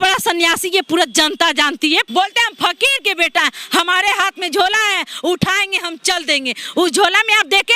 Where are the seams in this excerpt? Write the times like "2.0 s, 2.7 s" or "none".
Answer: 2.1 s